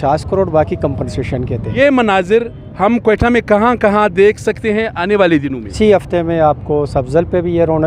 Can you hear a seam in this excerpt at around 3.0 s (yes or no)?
no